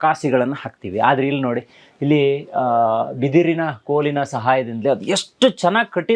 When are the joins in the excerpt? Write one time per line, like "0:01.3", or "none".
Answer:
none